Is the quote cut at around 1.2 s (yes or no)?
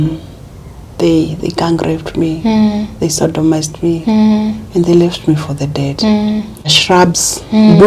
no